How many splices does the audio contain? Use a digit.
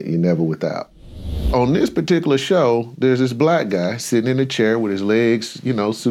1